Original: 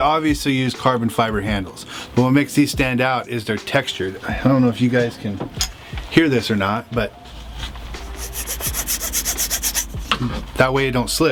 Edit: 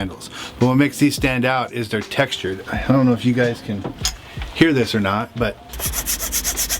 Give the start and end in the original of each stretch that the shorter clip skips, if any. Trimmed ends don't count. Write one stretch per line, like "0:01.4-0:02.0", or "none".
0:07.3-0:08.5